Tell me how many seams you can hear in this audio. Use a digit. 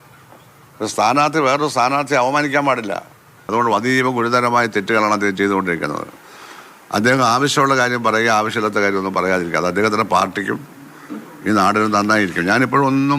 1